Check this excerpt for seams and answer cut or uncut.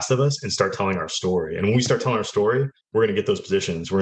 cut